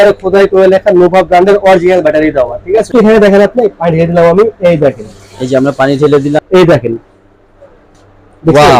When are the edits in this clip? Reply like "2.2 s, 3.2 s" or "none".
2.9 s, 6.4 s